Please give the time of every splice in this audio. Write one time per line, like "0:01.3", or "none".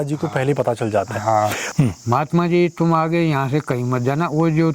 0:01.7